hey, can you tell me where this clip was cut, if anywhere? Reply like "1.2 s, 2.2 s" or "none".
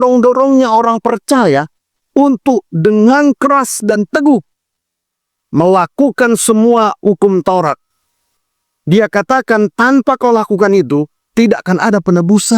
none